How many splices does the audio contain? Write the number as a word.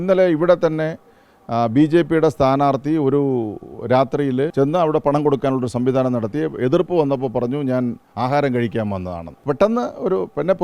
two